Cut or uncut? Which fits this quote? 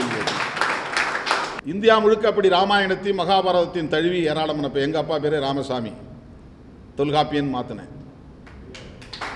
cut